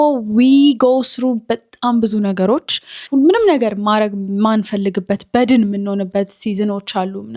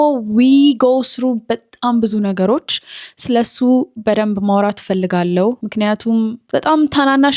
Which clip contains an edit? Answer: first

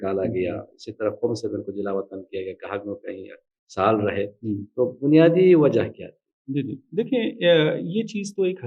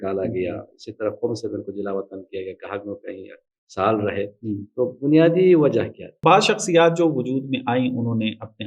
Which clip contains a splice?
second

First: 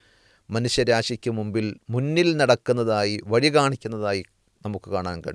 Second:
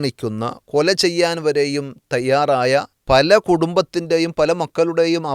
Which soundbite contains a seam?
second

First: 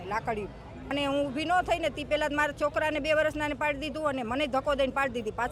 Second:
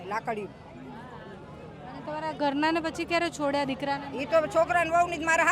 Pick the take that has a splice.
first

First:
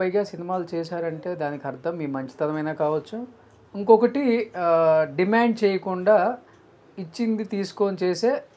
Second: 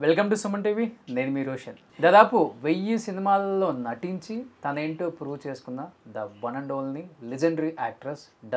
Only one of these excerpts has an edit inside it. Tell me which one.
second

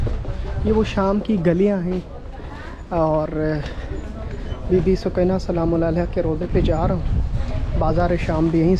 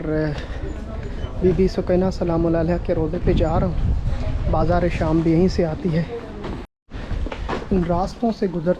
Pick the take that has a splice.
second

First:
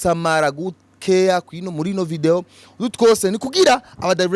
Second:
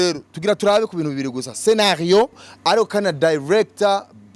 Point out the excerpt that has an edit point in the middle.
second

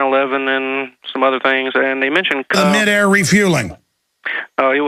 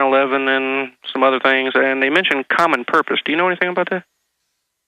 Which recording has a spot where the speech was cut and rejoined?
second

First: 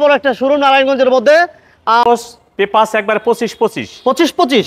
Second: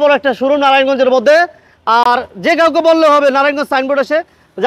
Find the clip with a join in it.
first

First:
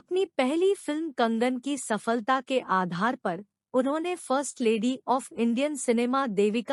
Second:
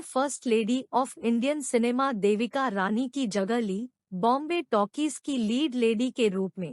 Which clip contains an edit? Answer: second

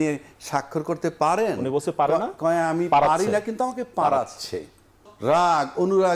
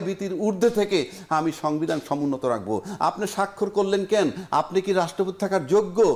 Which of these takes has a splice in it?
first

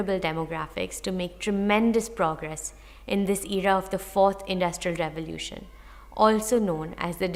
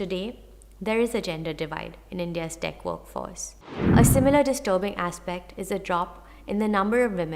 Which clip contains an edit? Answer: second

